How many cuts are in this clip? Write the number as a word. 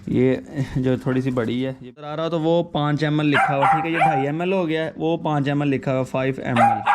one